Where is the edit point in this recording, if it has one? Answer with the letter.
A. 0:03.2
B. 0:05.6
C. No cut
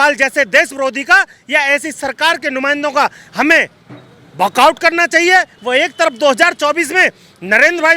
B